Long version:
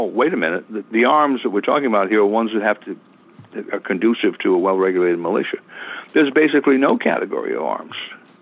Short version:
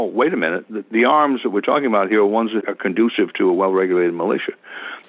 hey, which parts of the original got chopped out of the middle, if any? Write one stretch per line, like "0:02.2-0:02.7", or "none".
0:02.6-0:03.7